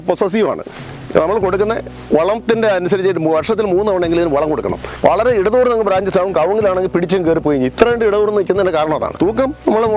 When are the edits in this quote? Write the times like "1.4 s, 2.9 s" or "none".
4.9 s, 9.2 s

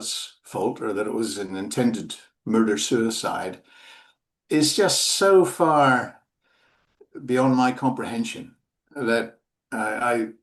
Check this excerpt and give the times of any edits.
none

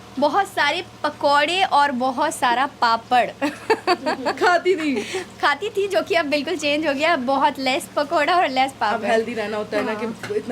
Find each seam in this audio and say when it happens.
none

